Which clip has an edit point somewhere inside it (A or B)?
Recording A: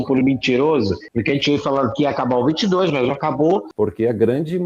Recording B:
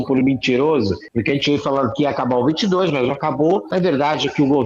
A